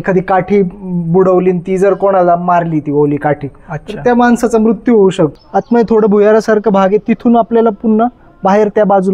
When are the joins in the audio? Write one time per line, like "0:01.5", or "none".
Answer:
0:05.4